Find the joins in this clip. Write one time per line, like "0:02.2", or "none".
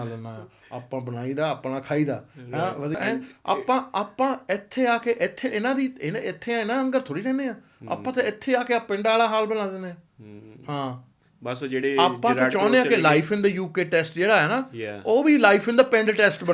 0:03.0